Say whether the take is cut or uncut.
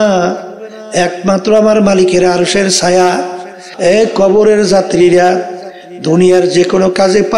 cut